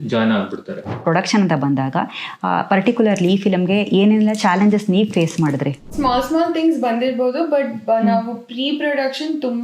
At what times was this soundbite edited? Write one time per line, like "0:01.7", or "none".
0:01.0
0:05.9